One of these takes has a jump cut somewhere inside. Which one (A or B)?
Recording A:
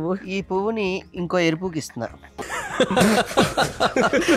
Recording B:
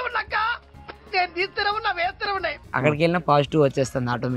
B